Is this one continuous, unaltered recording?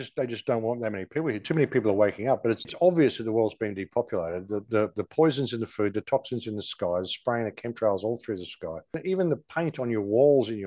no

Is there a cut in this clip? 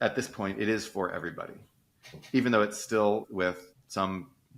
yes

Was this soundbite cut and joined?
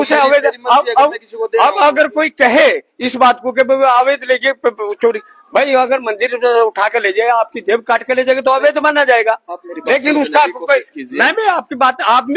no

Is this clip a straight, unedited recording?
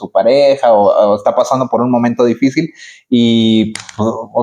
yes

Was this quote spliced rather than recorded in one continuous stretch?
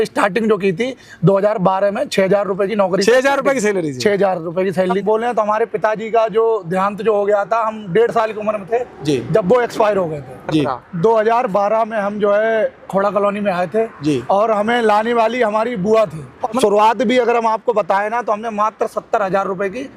yes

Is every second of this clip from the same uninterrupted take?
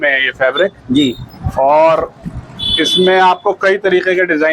yes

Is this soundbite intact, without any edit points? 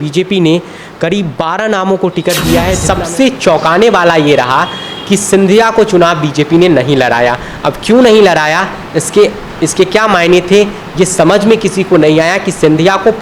no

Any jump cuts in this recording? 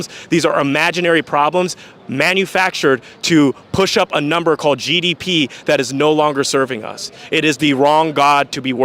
no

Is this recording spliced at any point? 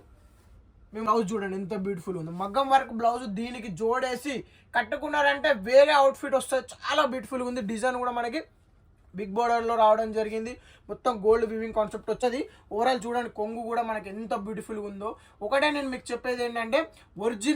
yes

